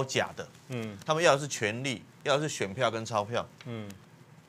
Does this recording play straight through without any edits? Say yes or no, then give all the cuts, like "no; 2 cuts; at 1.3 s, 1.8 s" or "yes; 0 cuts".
yes; 0 cuts